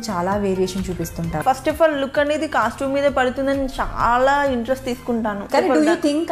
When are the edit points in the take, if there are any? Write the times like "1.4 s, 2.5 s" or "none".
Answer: 1.4 s, 5.4 s